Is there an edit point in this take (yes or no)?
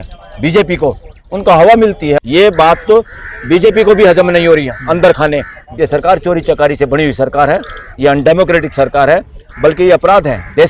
yes